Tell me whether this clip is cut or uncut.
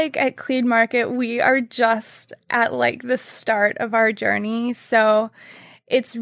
uncut